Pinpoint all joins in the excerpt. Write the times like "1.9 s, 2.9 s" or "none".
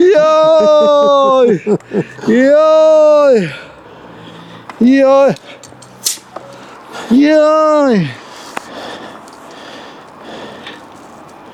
none